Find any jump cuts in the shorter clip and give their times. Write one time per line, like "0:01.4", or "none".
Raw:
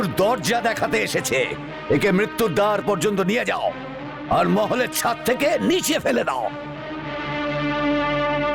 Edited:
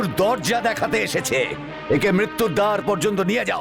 none